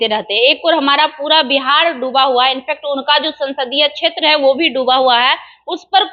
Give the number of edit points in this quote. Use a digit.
0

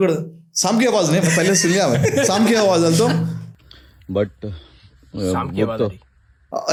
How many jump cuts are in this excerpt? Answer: 0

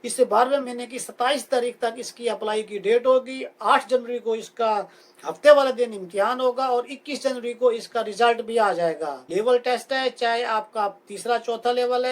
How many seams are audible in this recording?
1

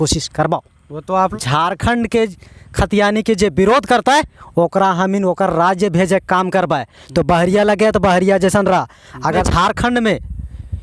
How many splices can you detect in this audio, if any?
2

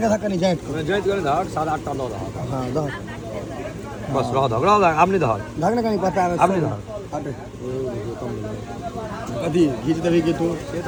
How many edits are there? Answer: 0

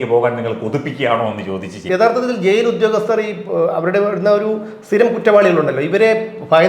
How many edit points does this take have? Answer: 1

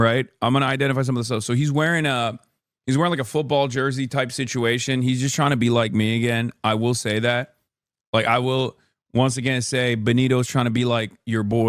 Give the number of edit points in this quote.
0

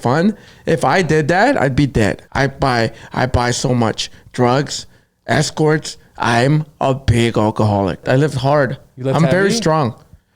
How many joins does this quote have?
2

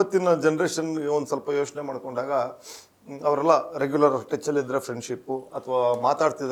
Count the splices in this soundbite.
0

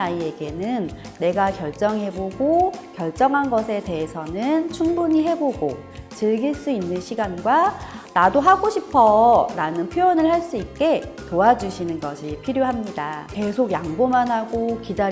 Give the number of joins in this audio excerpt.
1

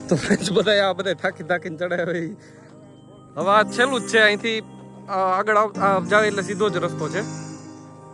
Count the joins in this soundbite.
0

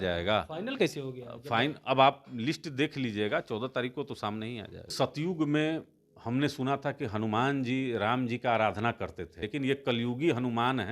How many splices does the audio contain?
2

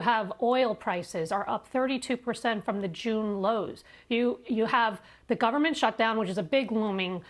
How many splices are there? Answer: 0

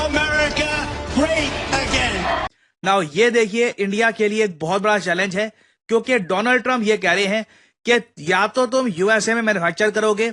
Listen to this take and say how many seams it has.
1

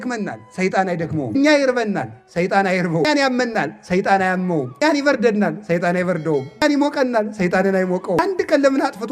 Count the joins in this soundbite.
5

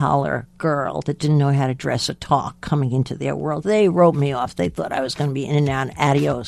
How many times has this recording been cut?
0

